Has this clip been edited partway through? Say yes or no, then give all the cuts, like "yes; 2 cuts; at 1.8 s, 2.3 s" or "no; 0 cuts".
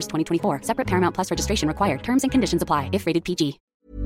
no; 0 cuts